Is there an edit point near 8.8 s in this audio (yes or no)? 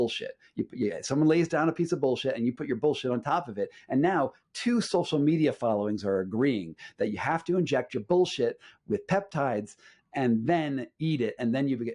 no